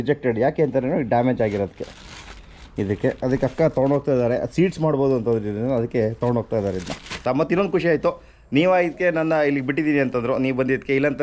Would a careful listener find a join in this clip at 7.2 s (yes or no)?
yes